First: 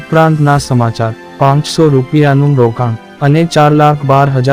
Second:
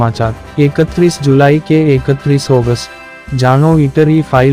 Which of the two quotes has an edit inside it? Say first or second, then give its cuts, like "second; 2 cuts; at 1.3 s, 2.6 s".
first; 1 cut; at 1.1 s